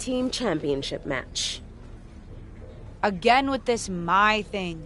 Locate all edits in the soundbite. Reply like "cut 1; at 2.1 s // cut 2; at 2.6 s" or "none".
cut 1; at 1.3 s // cut 2; at 3.0 s